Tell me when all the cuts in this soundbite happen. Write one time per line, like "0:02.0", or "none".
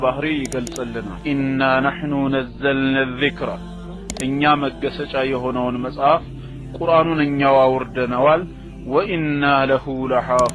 0:01.1